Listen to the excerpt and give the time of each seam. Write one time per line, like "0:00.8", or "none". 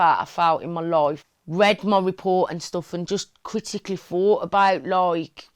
0:01.3